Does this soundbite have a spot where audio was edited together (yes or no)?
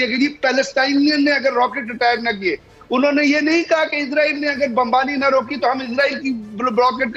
no